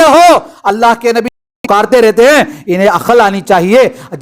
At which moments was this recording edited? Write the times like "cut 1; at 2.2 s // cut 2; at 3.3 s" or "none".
cut 1; at 1.5 s